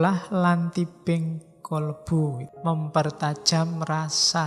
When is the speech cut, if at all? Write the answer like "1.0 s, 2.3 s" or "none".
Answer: 2.4 s